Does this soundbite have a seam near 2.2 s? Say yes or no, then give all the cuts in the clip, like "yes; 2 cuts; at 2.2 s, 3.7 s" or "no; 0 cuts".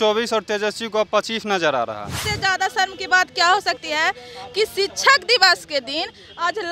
yes; 1 cut; at 2.2 s